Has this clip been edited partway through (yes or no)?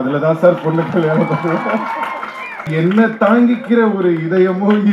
yes